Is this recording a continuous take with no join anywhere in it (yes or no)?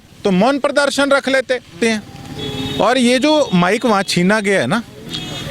no